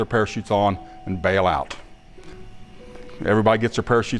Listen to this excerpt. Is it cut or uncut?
uncut